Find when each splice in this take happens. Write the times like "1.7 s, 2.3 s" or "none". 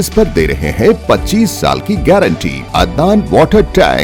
2.6 s